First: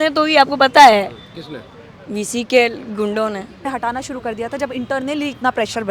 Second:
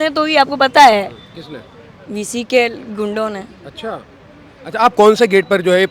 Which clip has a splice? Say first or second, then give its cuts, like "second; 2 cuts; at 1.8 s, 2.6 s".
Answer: first; 1 cut; at 3.6 s